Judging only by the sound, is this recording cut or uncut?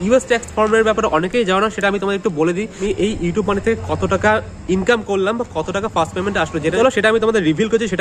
cut